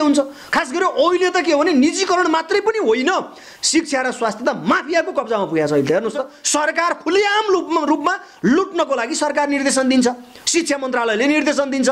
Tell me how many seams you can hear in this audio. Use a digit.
1